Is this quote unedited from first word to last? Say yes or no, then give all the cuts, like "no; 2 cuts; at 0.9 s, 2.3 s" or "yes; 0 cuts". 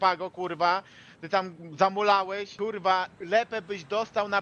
no; 1 cut; at 2.8 s